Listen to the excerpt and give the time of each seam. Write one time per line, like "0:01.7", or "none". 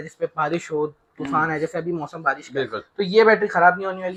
none